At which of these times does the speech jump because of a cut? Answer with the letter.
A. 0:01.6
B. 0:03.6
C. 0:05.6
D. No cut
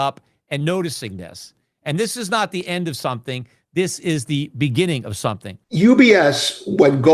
C